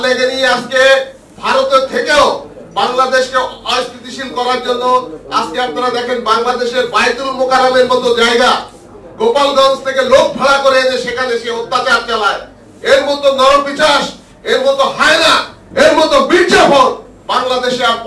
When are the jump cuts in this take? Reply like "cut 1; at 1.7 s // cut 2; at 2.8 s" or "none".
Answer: none